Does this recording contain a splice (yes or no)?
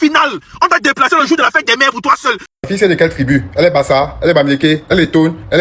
yes